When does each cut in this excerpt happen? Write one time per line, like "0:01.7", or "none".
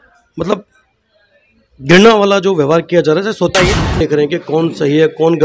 0:03.5